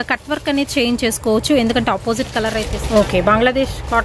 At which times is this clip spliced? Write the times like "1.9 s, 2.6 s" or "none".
2.7 s